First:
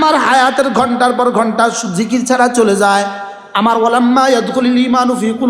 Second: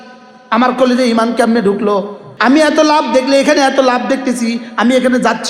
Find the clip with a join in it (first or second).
second